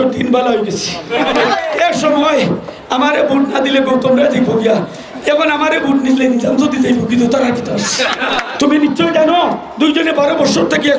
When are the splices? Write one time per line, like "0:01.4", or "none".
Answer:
0:01.5
0:08.4